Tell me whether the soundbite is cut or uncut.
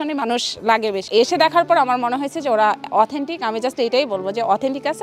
cut